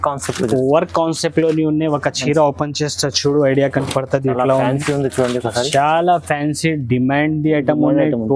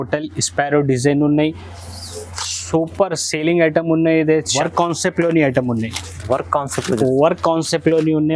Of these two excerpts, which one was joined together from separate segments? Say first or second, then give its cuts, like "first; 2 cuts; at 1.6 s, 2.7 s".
second; 1 cut; at 4.5 s